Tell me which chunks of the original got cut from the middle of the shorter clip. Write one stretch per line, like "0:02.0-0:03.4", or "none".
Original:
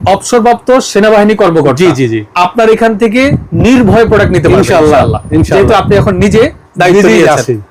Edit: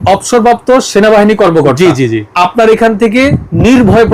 none